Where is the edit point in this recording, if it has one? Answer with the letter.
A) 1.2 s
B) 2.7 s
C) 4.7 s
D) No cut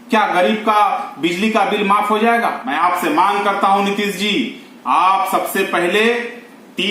B